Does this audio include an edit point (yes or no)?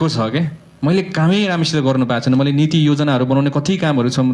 no